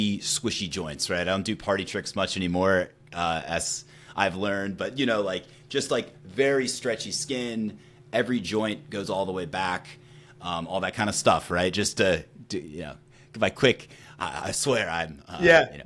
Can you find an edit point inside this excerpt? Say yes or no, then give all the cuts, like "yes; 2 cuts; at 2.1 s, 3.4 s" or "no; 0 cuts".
no; 0 cuts